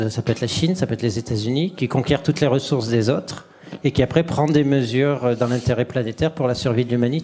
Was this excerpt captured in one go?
yes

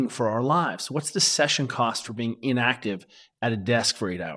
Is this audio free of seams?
yes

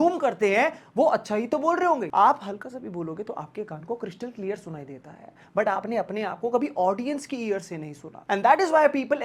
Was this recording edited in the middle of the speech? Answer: no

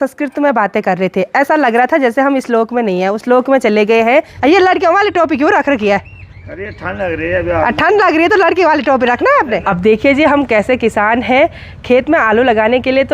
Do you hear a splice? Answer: yes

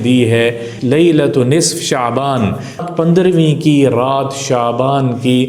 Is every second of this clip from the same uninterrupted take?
no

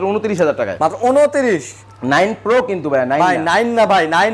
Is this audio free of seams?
yes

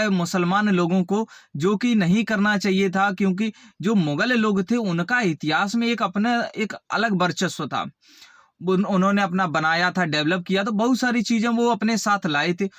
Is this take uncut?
yes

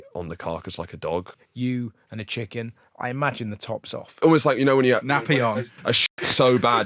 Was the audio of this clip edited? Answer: yes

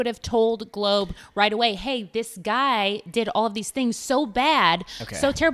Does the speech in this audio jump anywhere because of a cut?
no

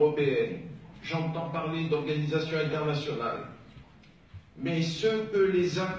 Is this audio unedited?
yes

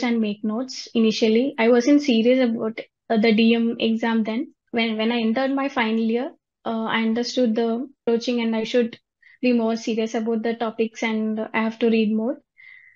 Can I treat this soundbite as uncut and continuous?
no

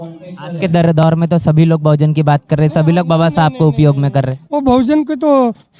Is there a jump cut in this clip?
no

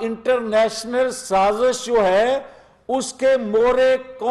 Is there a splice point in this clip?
no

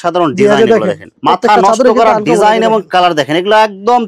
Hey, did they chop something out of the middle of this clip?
yes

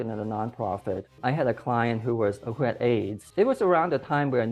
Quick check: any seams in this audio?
yes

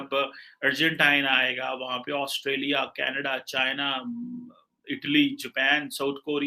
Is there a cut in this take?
no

